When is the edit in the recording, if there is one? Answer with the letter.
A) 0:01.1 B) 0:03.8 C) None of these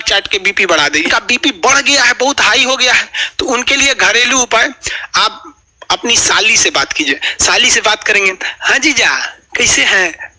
A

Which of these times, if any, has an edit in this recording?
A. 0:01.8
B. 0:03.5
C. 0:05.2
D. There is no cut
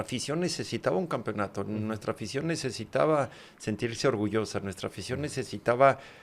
D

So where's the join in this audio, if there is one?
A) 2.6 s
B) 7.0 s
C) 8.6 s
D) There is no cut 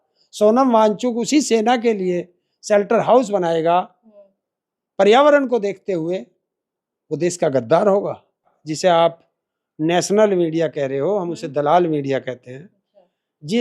C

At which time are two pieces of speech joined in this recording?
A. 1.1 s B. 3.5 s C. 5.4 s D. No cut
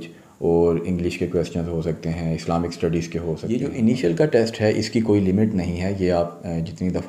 B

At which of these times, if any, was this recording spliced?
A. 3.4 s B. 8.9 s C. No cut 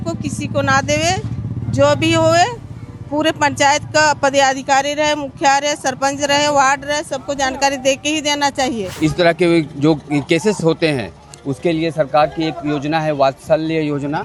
B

